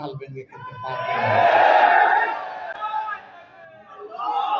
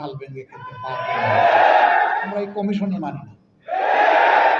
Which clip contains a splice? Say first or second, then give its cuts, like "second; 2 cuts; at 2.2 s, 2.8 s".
second; 1 cut; at 2.3 s